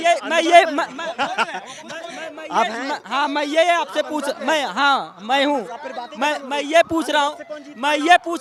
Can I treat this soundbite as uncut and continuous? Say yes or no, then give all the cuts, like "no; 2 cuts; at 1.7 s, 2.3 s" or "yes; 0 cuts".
yes; 0 cuts